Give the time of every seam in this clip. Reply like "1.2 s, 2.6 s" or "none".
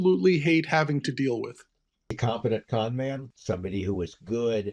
2.2 s, 3.3 s